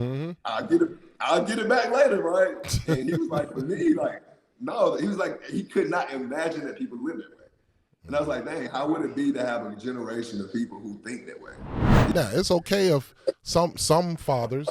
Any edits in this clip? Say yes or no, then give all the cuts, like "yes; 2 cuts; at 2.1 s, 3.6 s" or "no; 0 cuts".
yes; 1 cut; at 11.9 s